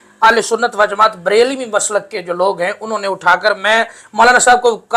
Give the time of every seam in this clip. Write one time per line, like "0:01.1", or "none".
none